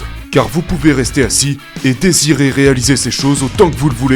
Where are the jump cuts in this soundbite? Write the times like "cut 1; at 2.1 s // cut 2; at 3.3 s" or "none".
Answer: none